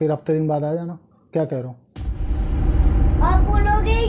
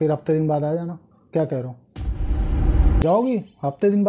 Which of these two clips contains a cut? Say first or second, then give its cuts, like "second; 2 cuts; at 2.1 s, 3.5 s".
second; 1 cut; at 3.0 s